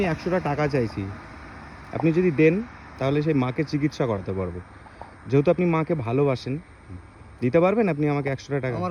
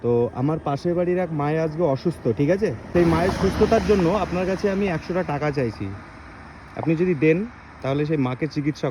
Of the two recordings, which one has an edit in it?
second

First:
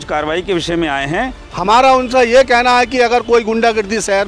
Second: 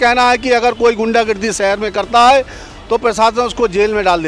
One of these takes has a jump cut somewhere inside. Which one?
first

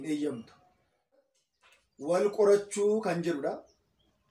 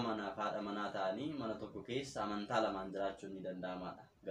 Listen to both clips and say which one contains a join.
first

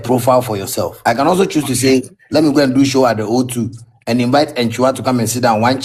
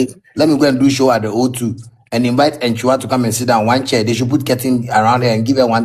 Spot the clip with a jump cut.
first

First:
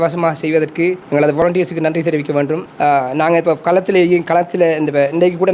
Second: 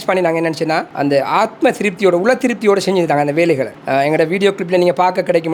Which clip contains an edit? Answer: first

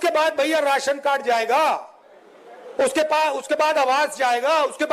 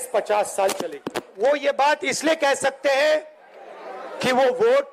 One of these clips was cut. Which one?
second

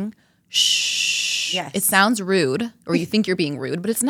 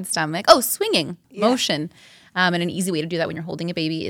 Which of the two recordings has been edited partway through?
second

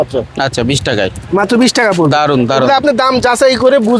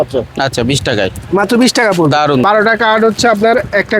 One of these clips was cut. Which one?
second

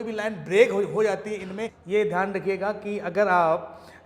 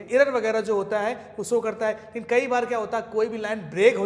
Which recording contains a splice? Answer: first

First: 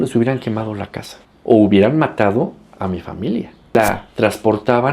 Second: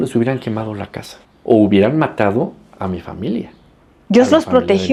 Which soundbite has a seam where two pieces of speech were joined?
first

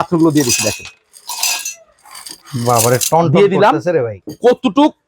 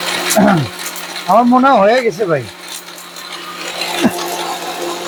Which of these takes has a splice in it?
first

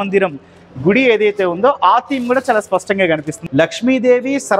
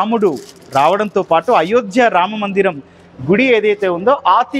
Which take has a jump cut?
first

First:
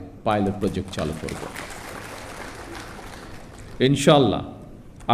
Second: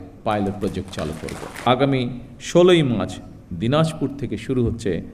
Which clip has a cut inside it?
second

